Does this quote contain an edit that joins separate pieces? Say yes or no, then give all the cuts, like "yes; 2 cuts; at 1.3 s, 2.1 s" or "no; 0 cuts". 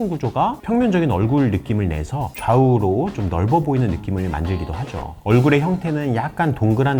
yes; 1 cut; at 5.1 s